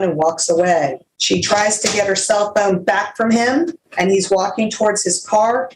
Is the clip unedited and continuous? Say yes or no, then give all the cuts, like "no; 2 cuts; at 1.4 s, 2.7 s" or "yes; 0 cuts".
no; 2 cuts; at 1.1 s, 3.8 s